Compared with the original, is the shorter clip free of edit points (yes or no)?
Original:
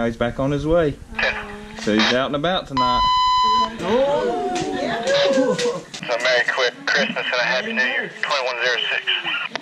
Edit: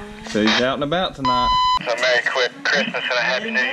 no